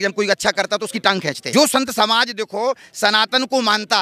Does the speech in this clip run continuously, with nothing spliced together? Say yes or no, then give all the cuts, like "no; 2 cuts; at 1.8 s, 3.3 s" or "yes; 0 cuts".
no; 1 cut; at 1.4 s